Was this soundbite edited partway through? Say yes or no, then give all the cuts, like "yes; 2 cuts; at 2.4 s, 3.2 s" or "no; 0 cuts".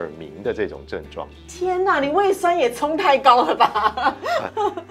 no; 0 cuts